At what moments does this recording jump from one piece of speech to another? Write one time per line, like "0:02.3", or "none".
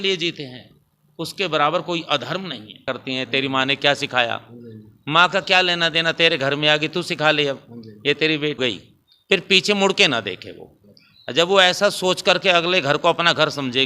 0:02.8
0:08.6